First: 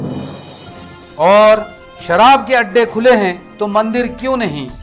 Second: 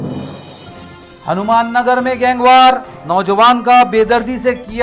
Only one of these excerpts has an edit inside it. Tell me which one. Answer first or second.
second